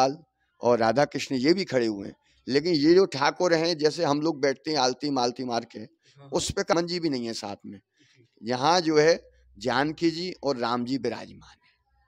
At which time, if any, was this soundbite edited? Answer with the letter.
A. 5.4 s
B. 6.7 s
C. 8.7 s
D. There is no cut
B